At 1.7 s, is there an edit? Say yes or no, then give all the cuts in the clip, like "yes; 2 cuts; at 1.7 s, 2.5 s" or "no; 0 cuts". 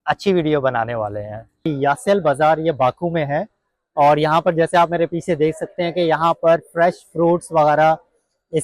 yes; 1 cut; at 1.7 s